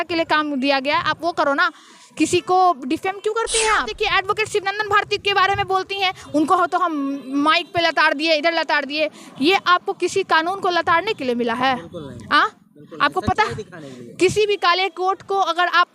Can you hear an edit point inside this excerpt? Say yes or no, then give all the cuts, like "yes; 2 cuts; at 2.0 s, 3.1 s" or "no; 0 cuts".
yes; 1 cut; at 3.9 s